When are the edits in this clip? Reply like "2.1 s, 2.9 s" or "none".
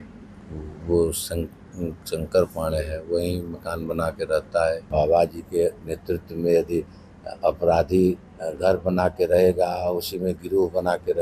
4.8 s